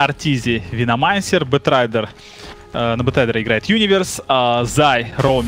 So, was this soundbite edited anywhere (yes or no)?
no